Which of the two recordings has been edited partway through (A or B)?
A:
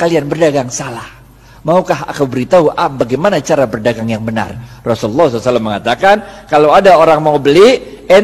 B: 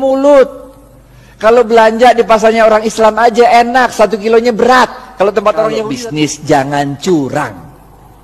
B